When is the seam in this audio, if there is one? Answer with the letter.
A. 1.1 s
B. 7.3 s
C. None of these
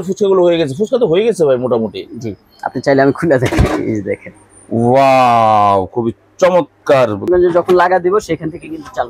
B